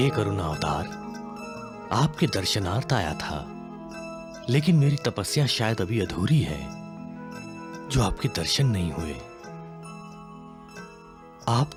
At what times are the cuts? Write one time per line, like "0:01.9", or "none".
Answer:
none

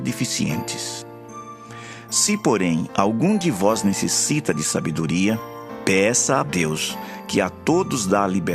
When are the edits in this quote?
none

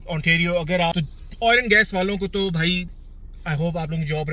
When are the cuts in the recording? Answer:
0:00.9

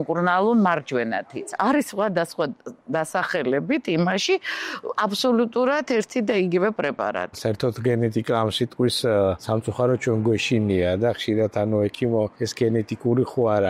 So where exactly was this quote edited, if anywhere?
0:01.5
0:07.4
0:09.4
0:12.4

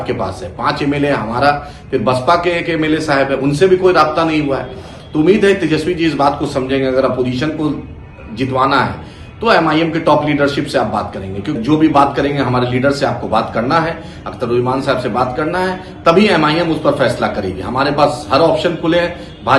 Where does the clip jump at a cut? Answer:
0:11.6

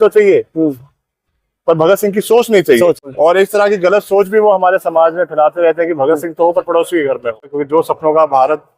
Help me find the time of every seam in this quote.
0:03.1
0:07.5

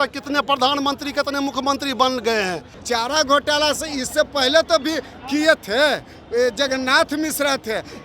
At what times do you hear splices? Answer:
0:02.7

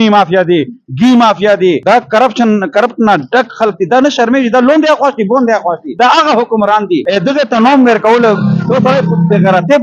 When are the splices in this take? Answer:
0:01.8
0:05.9
0:07.0

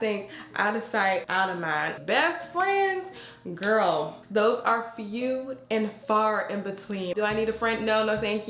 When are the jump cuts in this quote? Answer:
0:02.0
0:07.1

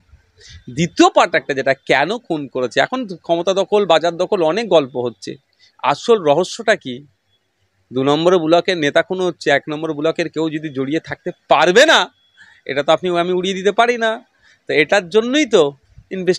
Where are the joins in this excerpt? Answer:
none

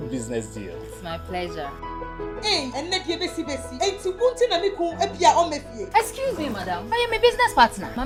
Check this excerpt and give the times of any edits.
none

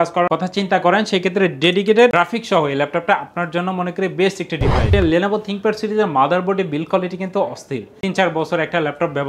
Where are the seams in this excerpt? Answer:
0:04.9
0:07.9

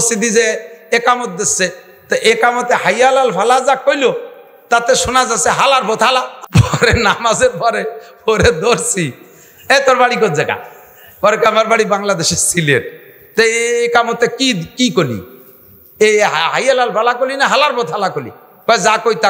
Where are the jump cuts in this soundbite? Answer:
0:06.4

